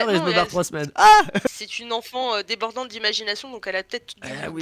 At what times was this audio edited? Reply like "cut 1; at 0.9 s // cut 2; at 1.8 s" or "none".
cut 1; at 1.4 s